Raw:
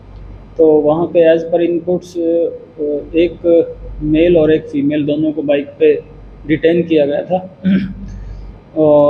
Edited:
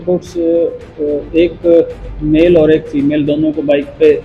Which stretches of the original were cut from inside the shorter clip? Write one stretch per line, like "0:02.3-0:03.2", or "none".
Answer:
none